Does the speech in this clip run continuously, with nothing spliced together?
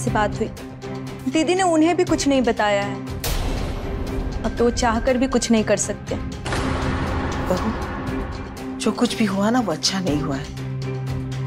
yes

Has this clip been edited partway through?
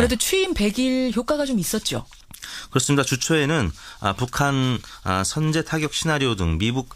no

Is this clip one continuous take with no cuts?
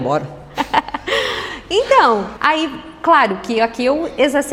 yes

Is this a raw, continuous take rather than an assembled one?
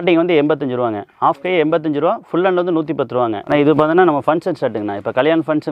no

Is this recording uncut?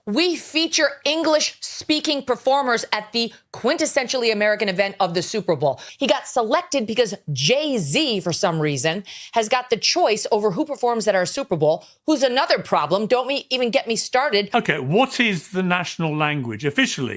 no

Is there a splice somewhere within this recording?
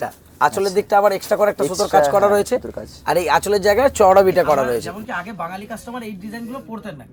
yes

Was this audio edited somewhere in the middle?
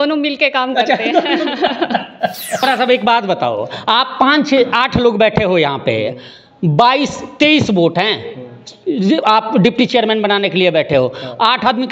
yes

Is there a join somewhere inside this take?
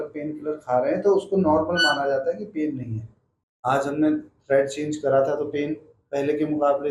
yes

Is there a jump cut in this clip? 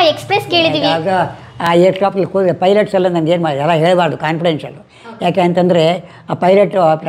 no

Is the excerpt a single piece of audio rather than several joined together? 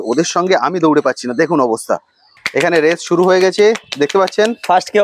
no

